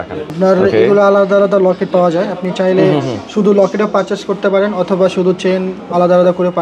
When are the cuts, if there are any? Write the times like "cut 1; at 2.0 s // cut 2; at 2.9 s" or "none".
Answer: none